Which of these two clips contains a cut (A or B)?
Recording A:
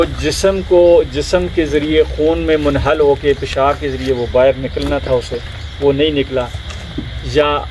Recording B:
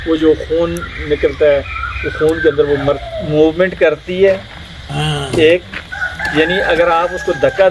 B